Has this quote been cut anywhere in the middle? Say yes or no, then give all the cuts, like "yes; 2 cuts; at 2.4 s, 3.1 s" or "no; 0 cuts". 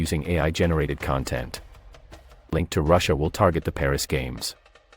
yes; 1 cut; at 2.5 s